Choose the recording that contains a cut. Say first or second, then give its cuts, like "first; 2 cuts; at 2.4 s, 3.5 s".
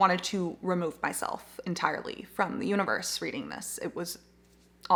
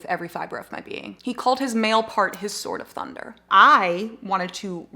second; 2 cuts; at 1.1 s, 3.4 s